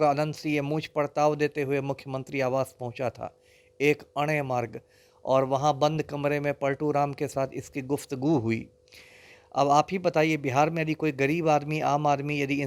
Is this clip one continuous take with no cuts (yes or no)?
yes